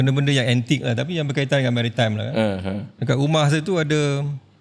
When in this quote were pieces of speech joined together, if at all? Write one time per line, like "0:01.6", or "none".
none